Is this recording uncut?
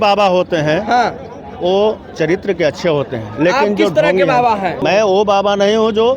no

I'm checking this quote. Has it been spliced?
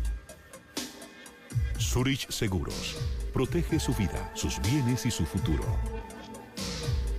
yes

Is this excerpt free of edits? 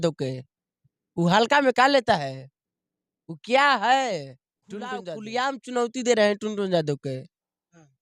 no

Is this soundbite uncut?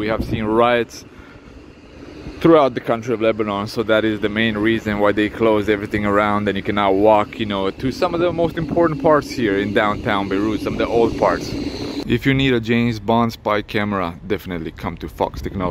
no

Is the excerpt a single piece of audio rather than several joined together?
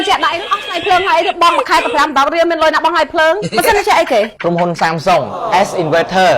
no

